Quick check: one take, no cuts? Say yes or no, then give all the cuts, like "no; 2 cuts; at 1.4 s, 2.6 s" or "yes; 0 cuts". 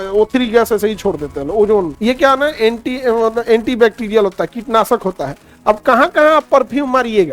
no; 1 cut; at 1.9 s